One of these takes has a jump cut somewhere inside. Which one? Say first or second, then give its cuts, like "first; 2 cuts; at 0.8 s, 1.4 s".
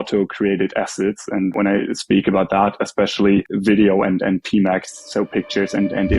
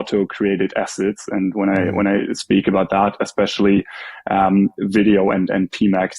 first; 2 cuts; at 1.5 s, 3.5 s